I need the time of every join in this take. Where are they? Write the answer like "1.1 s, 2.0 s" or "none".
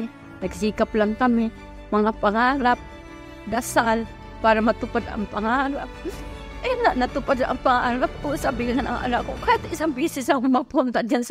none